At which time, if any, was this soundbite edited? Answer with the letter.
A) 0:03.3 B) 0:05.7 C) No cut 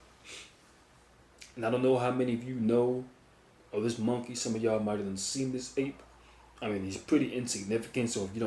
B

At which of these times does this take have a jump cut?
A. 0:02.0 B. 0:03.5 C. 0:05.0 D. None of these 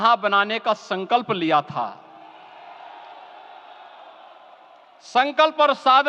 D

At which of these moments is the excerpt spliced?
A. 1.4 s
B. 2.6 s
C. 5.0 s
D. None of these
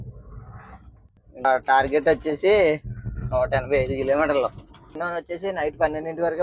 C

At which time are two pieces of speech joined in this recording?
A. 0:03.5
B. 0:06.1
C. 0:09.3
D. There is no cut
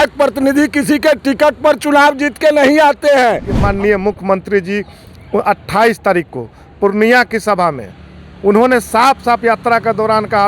A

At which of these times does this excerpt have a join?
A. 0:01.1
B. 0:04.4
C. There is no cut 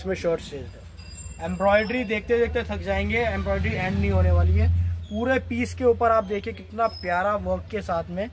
C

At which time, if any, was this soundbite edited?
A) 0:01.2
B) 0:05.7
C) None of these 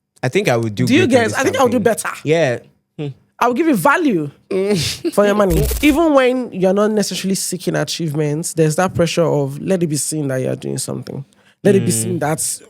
B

